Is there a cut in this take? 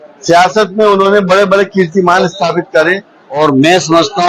yes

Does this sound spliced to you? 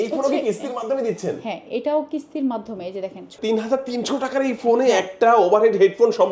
yes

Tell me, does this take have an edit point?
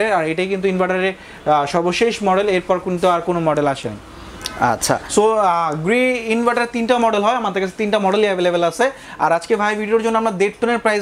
no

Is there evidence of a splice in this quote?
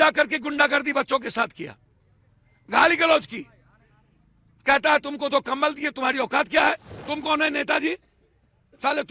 yes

